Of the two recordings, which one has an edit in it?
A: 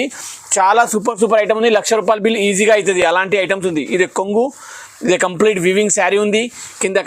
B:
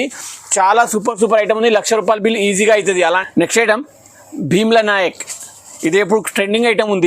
B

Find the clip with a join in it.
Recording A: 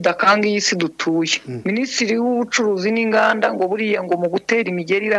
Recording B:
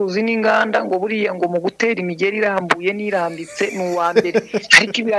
A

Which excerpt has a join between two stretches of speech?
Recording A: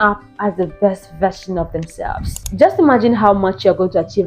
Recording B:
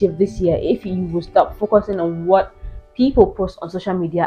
A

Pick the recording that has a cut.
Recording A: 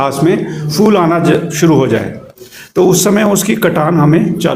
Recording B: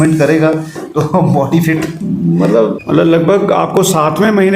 B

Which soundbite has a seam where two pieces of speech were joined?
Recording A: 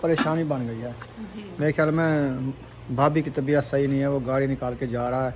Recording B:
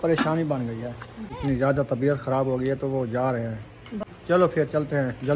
B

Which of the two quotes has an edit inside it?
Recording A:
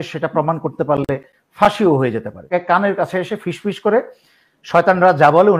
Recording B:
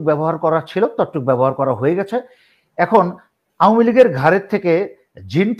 A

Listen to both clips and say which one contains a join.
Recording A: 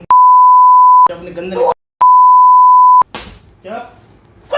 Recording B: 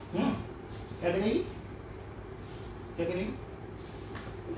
A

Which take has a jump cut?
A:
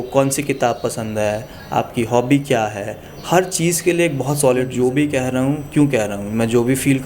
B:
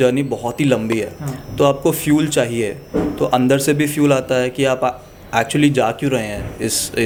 A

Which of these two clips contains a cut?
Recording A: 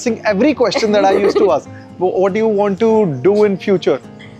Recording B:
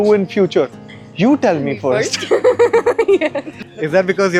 A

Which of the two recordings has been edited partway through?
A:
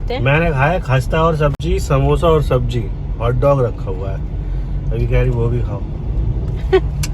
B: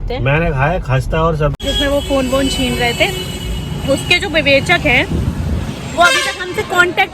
B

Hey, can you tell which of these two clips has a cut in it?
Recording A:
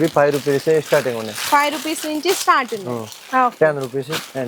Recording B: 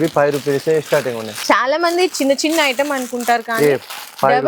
B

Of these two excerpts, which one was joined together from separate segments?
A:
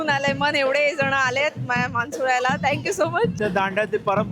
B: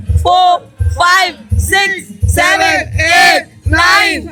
A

